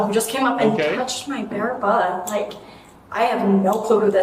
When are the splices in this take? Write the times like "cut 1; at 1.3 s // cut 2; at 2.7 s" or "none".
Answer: none